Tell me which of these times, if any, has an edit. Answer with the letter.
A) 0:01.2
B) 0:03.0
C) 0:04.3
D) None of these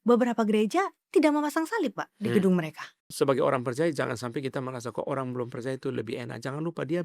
B